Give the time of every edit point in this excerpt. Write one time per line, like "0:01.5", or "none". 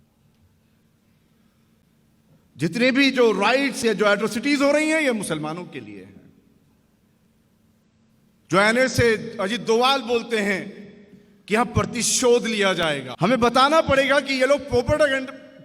0:13.1